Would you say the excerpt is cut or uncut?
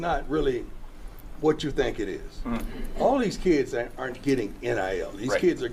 uncut